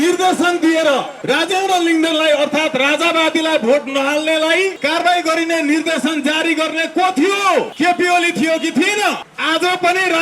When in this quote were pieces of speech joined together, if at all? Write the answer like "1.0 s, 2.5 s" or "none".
1.1 s, 4.8 s, 7.7 s, 9.3 s